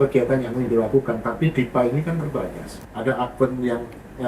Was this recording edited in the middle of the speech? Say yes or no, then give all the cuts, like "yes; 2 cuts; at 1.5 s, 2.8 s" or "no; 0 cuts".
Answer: yes; 1 cut; at 2.7 s